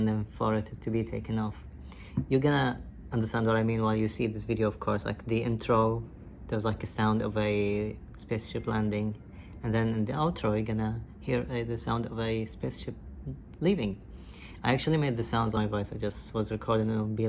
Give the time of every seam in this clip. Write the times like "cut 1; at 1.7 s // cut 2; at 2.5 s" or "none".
none